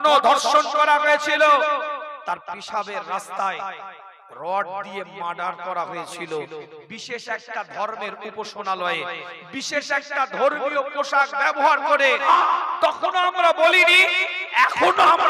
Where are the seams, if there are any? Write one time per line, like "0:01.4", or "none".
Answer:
0:12.3